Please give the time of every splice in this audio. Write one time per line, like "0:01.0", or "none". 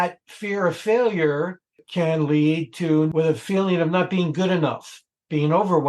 0:01.8
0:03.1

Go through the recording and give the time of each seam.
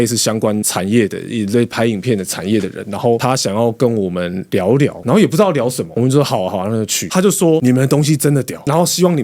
0:07.1

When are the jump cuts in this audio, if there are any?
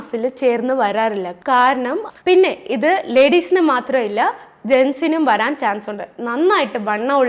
0:02.1

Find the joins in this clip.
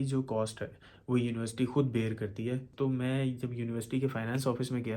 0:02.7

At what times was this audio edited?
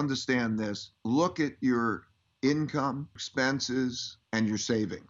0:00.9
0:03.2
0:04.1

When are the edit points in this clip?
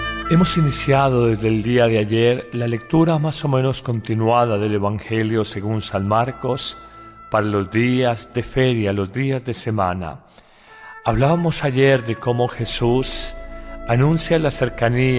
0:11.2

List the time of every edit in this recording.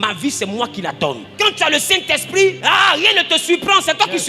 0:01.3
0:02.6

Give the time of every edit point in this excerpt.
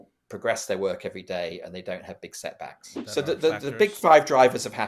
0:02.9

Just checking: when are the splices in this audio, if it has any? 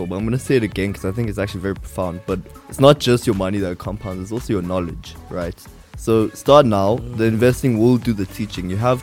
0:02.5

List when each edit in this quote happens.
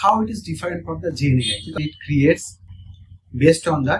0:01.8

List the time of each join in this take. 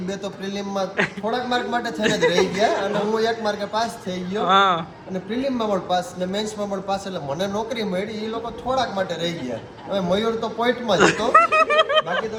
none

